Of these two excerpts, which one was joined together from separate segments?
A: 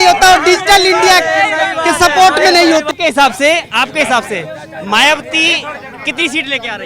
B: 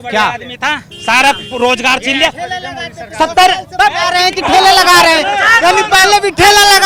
A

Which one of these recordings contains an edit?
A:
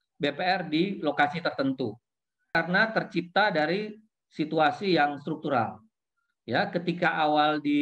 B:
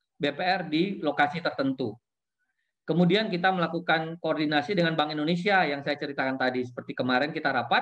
A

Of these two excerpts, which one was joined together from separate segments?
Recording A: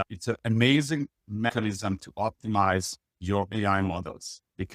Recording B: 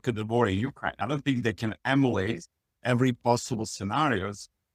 A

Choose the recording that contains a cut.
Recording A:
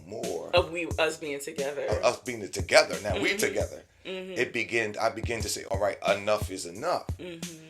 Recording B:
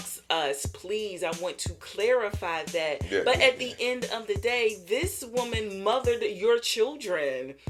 A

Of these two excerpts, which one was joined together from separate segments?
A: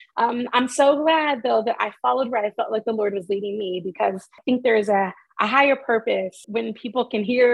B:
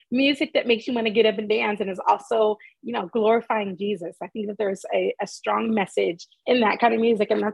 A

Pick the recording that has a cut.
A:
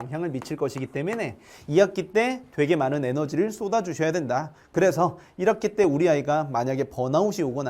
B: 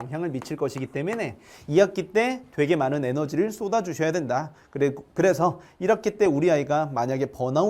A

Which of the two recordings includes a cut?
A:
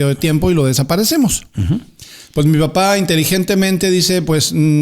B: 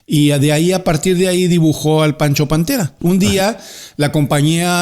B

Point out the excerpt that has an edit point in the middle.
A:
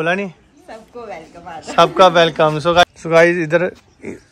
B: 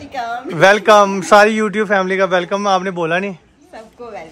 A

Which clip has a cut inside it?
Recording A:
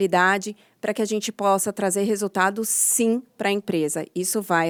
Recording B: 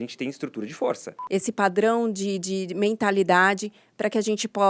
B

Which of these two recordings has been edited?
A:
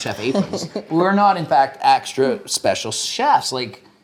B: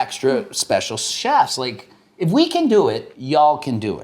B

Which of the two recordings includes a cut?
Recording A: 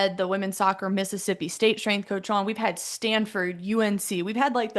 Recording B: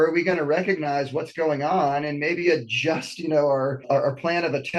B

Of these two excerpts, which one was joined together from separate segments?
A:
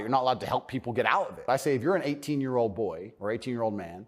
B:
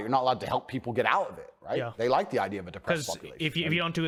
A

